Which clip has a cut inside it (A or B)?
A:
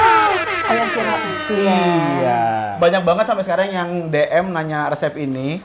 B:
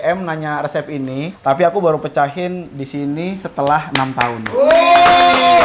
A